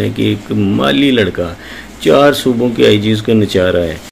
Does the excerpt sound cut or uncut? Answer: uncut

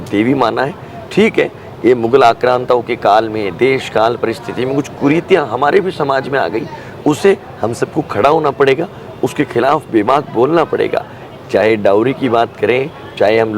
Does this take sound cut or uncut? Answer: uncut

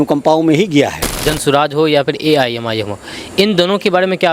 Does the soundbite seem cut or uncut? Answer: cut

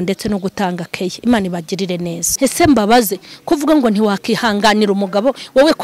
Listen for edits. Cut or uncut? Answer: cut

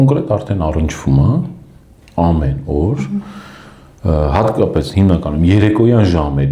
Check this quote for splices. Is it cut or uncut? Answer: uncut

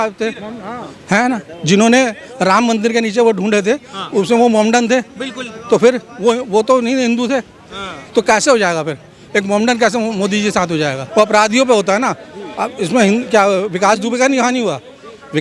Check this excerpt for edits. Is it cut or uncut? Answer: cut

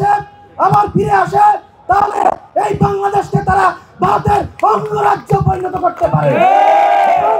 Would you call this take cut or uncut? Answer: uncut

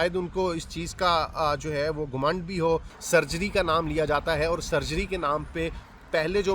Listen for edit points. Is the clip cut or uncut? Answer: cut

